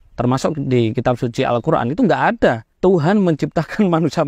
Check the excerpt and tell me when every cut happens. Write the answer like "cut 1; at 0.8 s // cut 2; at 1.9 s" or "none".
cut 1; at 2.7 s